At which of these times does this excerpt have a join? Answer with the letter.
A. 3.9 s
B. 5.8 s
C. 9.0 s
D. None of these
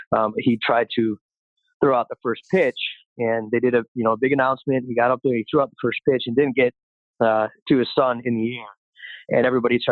D